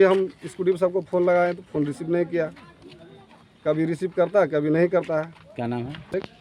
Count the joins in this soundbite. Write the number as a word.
zero